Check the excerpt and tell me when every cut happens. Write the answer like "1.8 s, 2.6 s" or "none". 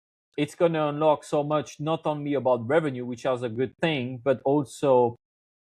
none